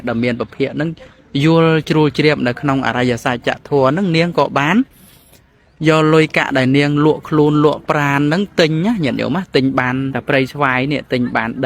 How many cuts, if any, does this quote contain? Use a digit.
1